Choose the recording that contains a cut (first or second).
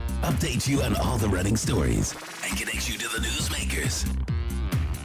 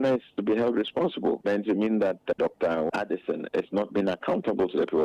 second